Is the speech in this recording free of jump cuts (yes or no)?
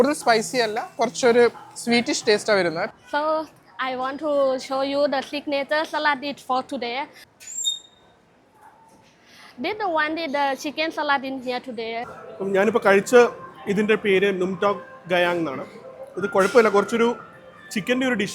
no